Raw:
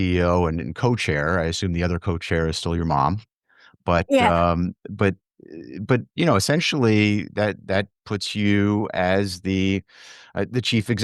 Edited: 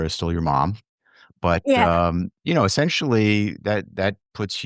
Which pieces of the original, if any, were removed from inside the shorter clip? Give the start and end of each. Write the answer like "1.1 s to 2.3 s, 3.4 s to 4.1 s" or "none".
4.8 s to 6.1 s